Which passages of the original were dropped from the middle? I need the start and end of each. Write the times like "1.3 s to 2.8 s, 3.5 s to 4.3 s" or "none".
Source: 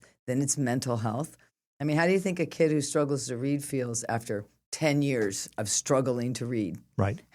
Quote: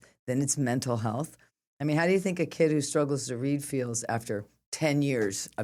none